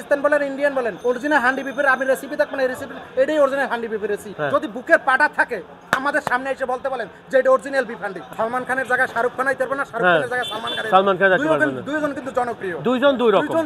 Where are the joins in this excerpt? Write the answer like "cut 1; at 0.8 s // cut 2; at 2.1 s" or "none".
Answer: cut 1; at 1.0 s // cut 2; at 4.3 s // cut 3; at 8.2 s